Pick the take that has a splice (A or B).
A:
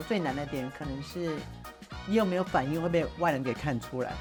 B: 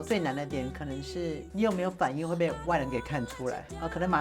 B